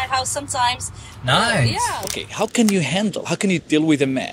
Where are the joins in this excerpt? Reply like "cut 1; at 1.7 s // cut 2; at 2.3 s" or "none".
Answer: cut 1; at 2.2 s